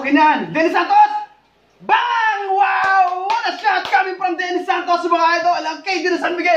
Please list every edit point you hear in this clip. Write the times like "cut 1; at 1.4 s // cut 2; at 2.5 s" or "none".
none